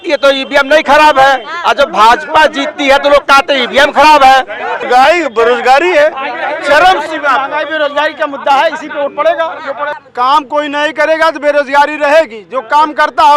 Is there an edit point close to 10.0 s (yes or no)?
yes